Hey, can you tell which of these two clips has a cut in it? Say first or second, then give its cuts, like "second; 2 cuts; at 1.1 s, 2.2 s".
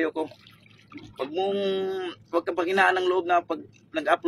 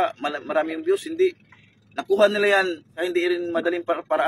second; 1 cut; at 2.9 s